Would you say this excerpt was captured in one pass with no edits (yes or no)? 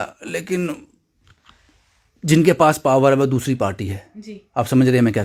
yes